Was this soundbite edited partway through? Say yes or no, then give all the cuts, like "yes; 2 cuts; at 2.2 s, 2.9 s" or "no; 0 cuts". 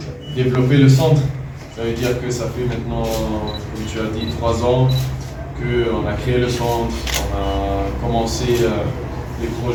no; 0 cuts